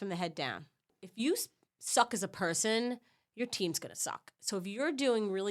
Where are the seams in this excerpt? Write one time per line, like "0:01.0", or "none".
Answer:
0:01.0